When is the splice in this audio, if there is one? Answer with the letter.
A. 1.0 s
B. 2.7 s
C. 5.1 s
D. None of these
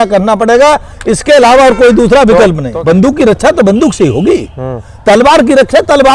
B